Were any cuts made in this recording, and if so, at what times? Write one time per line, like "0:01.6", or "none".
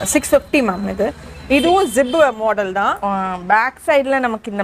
none